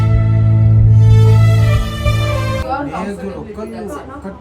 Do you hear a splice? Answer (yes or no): yes